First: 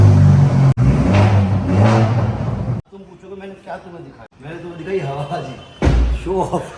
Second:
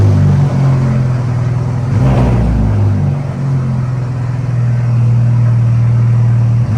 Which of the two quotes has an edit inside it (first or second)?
first